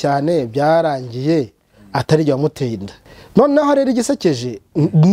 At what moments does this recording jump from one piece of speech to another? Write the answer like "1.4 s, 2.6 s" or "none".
3.2 s